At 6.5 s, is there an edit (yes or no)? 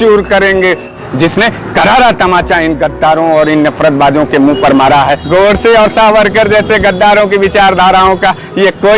no